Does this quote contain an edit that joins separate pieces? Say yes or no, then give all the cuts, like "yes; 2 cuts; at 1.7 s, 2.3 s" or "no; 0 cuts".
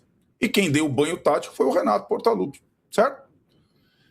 no; 0 cuts